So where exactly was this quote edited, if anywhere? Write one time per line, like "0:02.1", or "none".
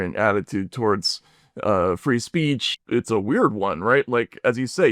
0:02.7